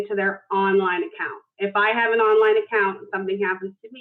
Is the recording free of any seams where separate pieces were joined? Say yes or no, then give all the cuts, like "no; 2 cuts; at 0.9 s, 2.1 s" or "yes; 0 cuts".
yes; 0 cuts